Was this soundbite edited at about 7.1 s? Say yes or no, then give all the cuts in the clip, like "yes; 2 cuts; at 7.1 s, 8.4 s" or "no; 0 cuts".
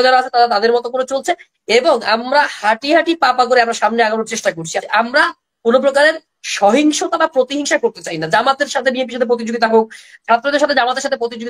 no; 1 cut; at 4.8 s